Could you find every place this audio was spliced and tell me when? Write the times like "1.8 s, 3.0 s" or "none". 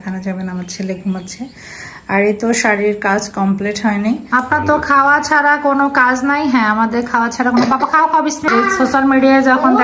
4.2 s, 8.5 s

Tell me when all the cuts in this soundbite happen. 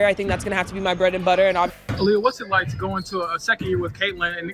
1.8 s

